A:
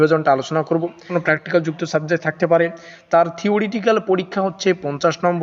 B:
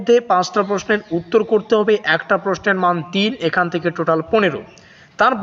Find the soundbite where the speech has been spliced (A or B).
A